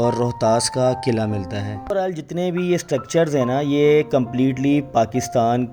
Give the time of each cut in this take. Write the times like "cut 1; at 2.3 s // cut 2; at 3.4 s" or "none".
cut 1; at 1.9 s